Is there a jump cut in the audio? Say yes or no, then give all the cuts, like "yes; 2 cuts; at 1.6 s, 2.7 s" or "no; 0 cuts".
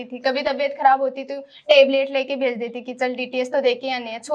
no; 0 cuts